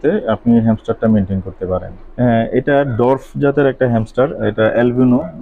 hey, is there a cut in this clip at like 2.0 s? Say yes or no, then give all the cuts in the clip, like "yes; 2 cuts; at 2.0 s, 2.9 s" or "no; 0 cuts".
yes; 1 cut; at 2.0 s